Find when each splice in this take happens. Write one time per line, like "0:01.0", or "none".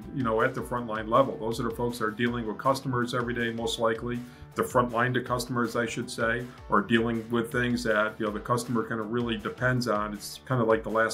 none